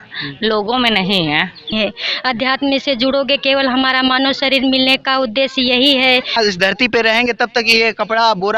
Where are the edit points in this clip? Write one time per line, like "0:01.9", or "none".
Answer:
0:01.7
0:06.3